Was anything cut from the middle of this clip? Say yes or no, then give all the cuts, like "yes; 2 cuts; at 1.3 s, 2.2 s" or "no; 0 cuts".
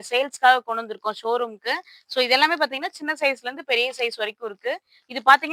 no; 0 cuts